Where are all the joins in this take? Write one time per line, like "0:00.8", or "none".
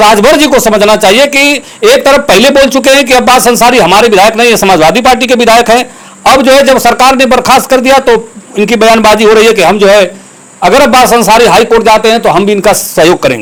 none